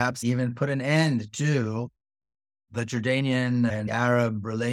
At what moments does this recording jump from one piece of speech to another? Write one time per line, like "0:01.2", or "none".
0:02.7
0:03.9